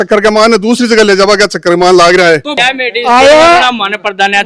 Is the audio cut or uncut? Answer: cut